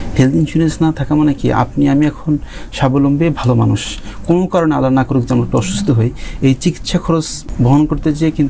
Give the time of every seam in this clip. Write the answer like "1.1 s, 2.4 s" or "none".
7.4 s